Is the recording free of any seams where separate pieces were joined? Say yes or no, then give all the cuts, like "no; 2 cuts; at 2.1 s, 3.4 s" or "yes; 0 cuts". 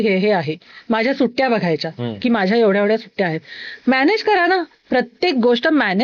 yes; 0 cuts